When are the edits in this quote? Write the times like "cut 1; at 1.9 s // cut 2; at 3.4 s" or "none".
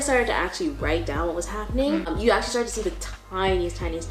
cut 1; at 2.1 s